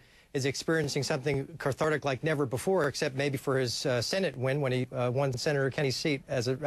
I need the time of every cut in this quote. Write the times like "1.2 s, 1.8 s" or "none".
none